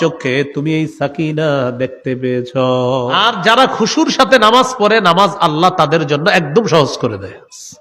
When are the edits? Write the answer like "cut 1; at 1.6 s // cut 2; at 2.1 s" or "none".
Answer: cut 1; at 3.1 s